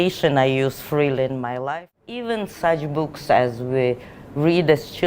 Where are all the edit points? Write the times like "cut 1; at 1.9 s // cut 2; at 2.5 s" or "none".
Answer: cut 1; at 1.7 s

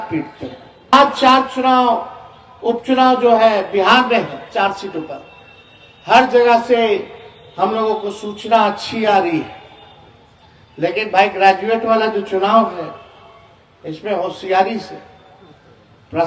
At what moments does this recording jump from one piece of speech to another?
cut 1; at 0.9 s

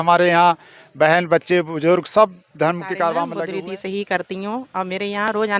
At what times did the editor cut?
cut 1; at 3.3 s

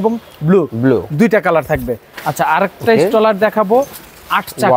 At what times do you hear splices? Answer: cut 1; at 2.2 s

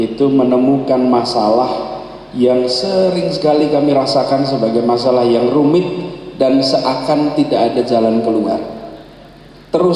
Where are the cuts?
none

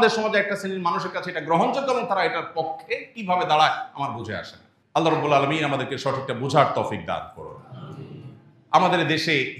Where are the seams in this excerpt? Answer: none

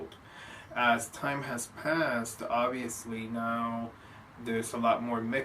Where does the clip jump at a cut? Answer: cut 1; at 4.3 s

